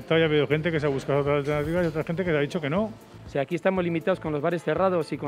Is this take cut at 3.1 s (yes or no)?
yes